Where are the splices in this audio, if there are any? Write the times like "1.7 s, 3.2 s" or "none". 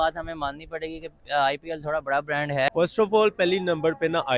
2.7 s